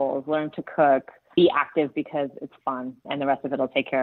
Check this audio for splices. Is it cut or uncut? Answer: cut